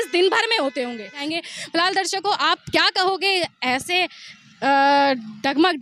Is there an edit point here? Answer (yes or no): yes